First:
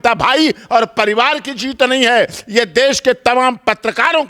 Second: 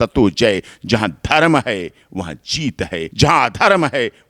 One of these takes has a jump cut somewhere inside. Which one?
second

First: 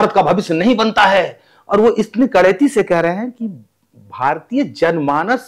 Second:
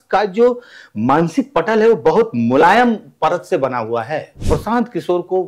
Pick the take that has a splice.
second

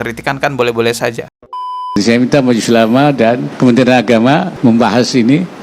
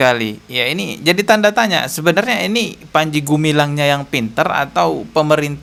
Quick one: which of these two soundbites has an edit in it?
first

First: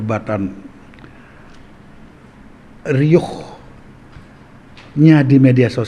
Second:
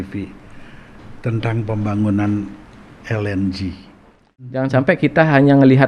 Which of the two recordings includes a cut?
second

